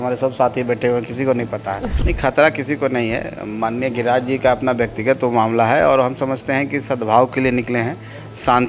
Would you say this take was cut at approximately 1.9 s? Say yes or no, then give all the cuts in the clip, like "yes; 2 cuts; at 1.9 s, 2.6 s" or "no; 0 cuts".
yes; 1 cut; at 1.9 s